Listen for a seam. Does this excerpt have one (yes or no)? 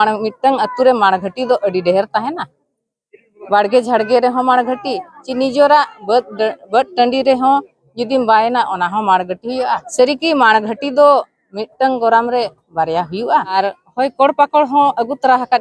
yes